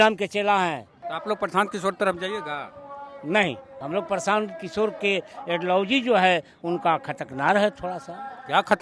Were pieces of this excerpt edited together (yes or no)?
yes